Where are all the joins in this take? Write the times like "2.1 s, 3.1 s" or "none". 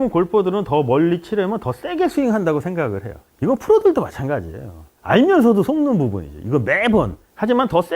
none